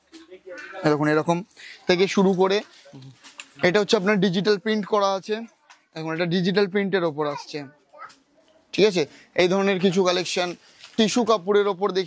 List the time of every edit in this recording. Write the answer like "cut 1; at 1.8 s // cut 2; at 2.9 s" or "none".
none